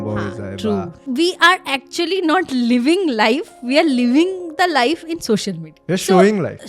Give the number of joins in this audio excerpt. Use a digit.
1